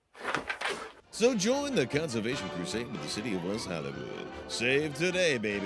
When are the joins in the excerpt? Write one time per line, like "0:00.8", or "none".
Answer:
0:01.0